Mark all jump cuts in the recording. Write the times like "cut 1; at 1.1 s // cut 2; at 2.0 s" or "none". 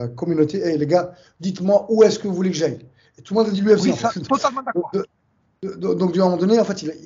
none